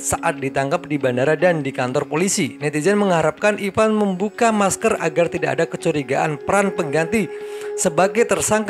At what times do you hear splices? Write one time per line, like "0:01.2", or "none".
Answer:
none